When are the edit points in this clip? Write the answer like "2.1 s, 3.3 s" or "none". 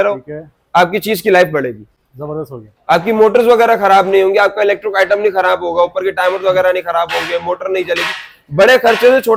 none